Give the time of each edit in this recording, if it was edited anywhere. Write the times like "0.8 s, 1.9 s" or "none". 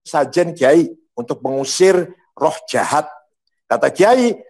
none